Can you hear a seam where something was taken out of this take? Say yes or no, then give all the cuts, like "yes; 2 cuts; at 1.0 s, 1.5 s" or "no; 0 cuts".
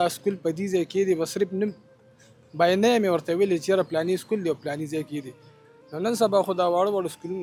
no; 0 cuts